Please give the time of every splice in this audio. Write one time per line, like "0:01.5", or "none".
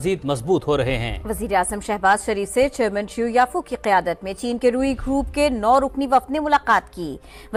none